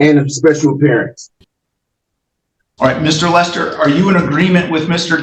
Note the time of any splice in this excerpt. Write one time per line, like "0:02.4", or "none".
none